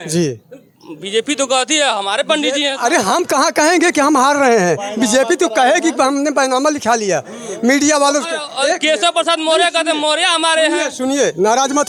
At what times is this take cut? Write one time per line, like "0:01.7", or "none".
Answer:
none